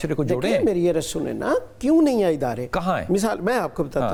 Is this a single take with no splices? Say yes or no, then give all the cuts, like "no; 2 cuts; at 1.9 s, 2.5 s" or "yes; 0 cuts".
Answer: yes; 0 cuts